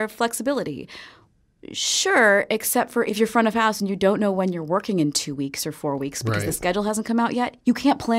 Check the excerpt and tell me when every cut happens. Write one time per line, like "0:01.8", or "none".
0:03.1